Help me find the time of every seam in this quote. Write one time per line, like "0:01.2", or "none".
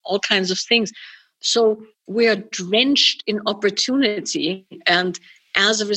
0:01.9